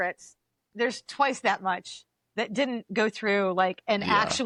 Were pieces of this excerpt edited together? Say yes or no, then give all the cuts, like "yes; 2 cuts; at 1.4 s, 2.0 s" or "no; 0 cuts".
no; 0 cuts